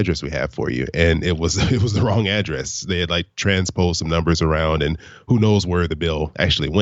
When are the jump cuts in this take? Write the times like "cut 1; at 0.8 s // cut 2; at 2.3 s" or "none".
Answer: none